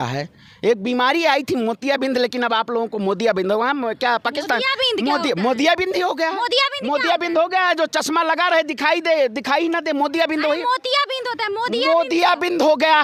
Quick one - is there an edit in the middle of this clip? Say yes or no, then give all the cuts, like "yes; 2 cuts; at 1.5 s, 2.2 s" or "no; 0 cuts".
no; 0 cuts